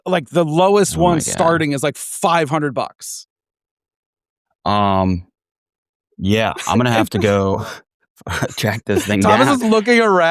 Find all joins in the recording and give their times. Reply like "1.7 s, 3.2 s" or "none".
none